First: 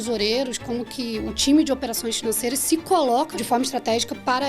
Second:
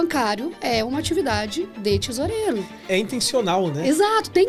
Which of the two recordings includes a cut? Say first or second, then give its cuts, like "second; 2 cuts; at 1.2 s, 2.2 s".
first; 1 cut; at 3.4 s